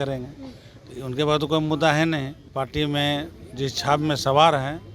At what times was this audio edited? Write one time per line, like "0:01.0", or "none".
0:02.4